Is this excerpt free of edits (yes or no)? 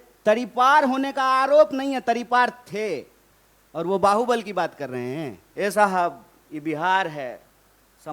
no